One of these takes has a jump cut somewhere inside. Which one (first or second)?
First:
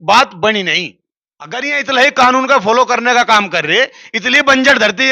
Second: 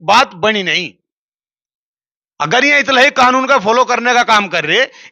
first